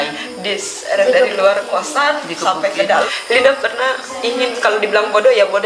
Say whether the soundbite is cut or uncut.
cut